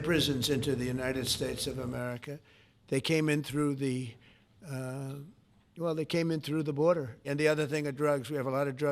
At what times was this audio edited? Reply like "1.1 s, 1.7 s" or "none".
7.3 s